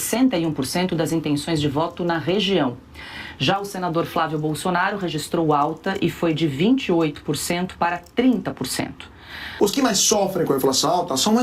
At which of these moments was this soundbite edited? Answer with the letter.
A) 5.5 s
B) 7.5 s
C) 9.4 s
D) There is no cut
C